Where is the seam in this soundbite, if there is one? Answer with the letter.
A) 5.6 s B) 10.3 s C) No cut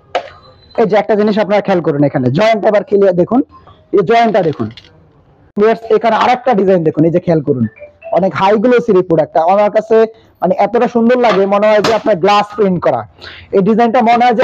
A